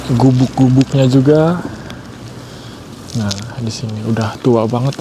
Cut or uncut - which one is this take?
uncut